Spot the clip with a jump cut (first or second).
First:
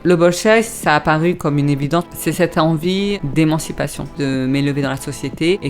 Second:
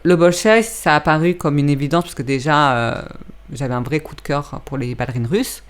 first